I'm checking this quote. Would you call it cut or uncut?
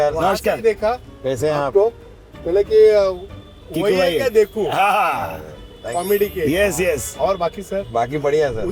uncut